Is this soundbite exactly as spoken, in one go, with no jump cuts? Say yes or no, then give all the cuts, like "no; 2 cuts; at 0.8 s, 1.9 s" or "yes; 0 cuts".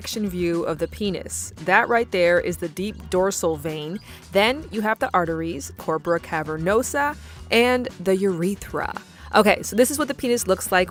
yes; 0 cuts